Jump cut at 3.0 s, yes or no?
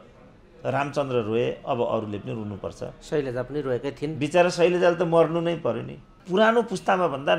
no